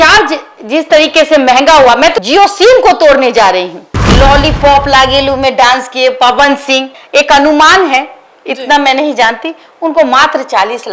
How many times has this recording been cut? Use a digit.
2